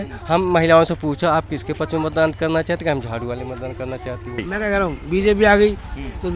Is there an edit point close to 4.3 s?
yes; 1 cut; at 4.3 s

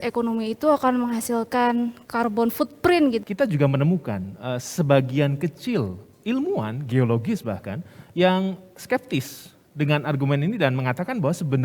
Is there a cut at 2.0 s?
yes; 2 cuts; at 2.0 s, 3.2 s

